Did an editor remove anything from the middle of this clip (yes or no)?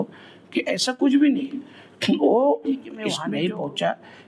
yes